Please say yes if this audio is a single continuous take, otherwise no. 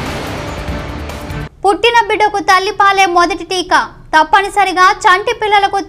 no